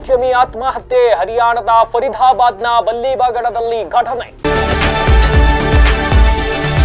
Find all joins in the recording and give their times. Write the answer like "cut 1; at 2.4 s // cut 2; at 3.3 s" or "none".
cut 1; at 4.3 s